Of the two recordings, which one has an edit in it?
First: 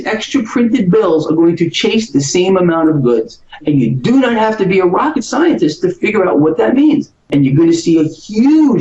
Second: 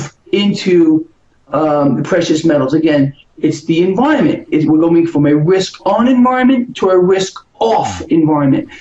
first; 1 cut; at 7.2 s

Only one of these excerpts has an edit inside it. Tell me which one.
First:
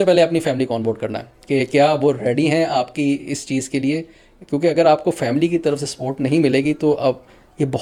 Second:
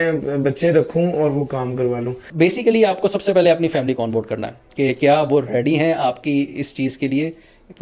second; 1 cut; at 2.2 s

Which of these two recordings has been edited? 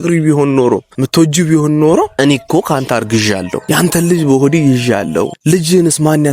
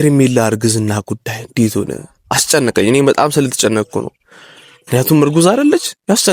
first; 4 cuts; at 1.0 s, 2.1 s, 3.6 s, 5.4 s

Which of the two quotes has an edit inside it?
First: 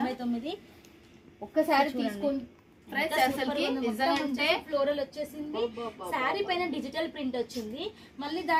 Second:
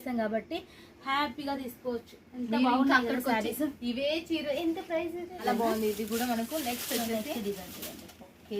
second; 1 cut; at 5.4 s

